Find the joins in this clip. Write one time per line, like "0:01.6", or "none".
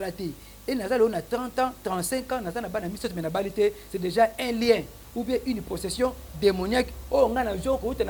none